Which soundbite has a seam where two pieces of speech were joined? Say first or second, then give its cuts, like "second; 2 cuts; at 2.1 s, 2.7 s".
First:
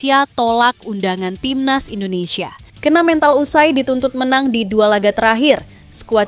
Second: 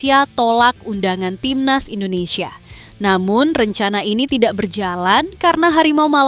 first; 1 cut; at 2.6 s